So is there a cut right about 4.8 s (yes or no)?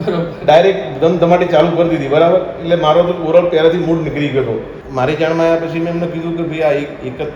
yes